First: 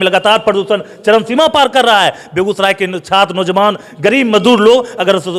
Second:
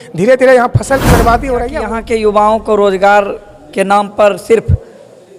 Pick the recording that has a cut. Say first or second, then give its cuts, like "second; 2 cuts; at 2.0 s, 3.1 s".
second; 1 cut; at 1.8 s